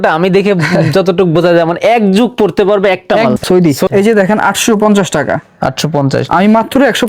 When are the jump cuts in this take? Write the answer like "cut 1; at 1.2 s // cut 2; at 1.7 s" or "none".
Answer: cut 1; at 3.4 s